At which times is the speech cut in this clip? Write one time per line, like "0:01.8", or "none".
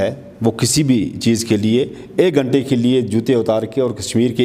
none